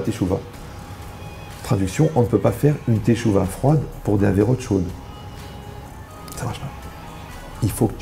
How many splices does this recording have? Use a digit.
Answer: 1